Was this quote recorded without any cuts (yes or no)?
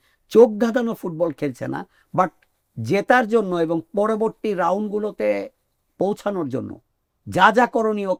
yes